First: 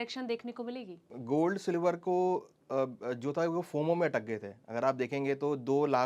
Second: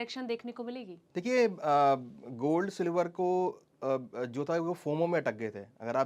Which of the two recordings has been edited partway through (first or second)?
first